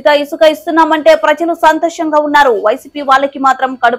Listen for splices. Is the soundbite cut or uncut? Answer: uncut